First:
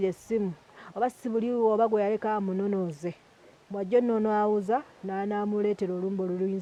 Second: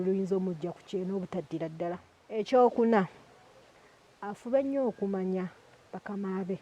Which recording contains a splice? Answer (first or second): second